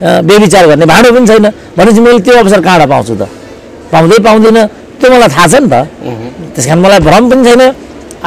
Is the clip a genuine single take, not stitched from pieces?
yes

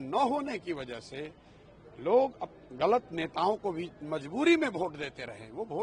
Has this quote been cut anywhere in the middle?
no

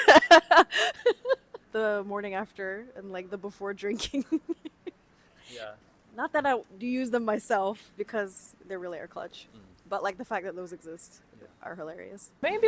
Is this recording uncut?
yes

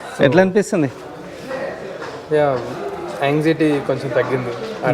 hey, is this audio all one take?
yes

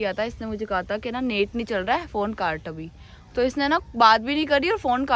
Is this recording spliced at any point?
no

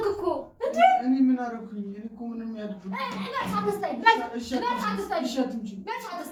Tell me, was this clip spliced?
no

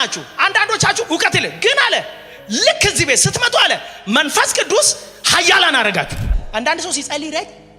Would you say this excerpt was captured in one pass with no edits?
no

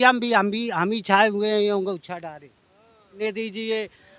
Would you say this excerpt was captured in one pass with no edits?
no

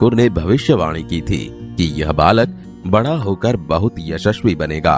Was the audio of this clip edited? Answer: yes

